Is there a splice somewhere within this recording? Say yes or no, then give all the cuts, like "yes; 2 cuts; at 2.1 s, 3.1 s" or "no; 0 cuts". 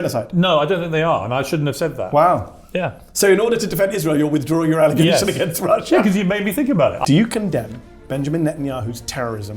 yes; 1 cut; at 7.0 s